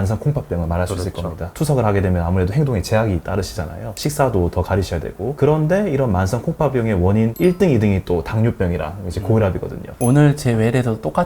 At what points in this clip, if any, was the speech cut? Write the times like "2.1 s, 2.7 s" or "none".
9.8 s